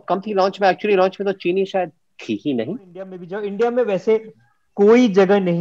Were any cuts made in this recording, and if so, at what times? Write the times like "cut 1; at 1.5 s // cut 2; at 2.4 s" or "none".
cut 1; at 3.3 s